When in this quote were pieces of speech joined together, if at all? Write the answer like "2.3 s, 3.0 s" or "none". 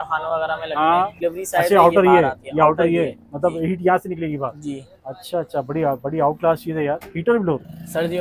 1.1 s, 7.1 s